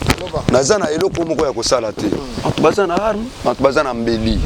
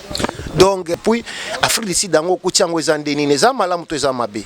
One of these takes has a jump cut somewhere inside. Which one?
second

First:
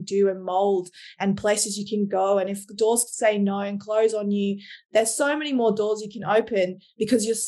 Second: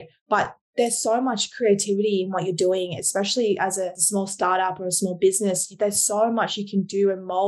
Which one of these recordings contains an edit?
second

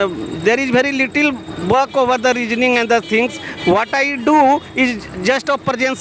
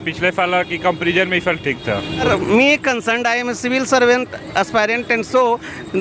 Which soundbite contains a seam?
second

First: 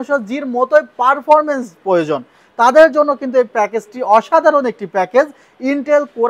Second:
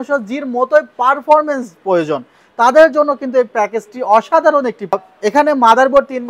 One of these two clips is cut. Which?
second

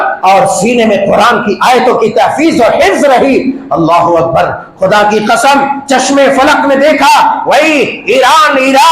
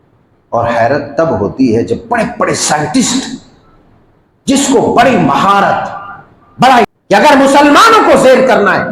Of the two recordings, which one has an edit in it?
second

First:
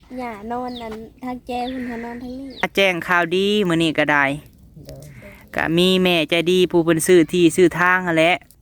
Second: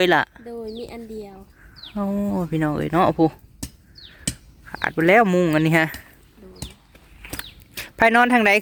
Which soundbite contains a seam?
first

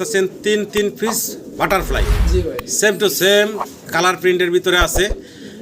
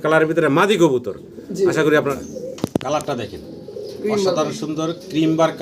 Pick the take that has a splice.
second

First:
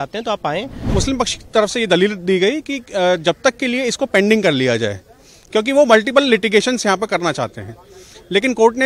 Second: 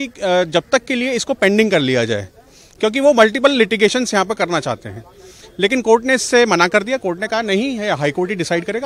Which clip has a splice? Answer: first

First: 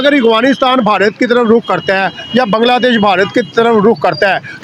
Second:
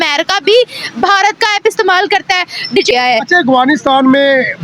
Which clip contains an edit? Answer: second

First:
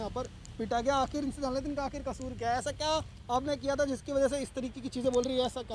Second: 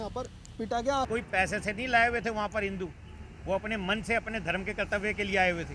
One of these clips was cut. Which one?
second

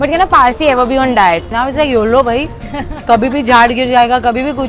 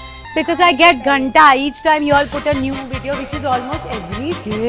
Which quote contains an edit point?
first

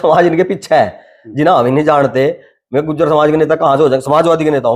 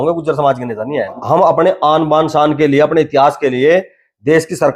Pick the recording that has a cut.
second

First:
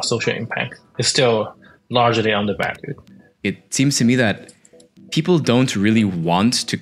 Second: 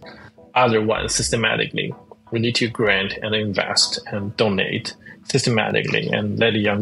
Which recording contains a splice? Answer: first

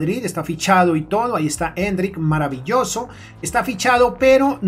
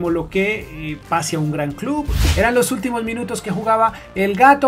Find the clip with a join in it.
second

